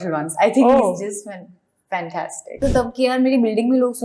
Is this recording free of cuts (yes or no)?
no